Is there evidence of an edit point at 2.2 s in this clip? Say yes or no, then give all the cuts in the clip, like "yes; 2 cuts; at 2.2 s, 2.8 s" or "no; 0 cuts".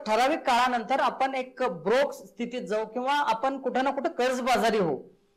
no; 0 cuts